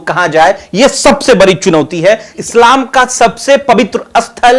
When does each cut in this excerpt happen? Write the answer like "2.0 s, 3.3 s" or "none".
2.4 s